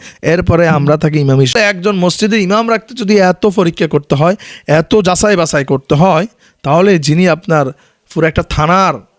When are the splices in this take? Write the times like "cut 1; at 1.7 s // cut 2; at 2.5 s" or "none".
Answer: cut 1; at 1.5 s